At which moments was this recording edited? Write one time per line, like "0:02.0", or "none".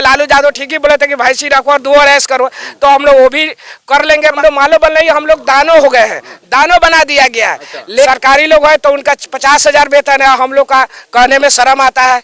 0:04.2
0:08.1